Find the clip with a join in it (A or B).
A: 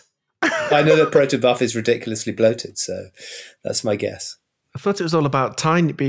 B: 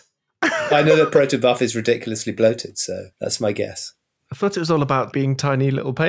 B